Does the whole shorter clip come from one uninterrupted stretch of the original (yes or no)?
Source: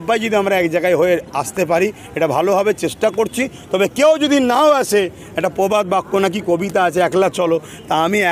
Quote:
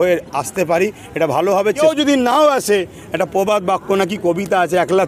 no